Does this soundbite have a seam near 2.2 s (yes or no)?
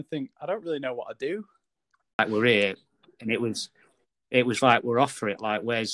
yes